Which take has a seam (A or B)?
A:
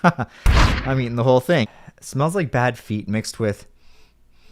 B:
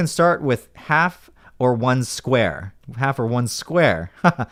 A